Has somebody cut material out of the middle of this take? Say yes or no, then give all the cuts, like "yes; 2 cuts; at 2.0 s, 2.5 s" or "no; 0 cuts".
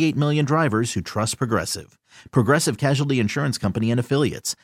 no; 0 cuts